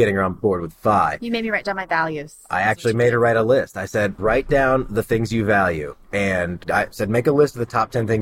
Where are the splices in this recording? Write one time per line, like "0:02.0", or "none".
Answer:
0:04.1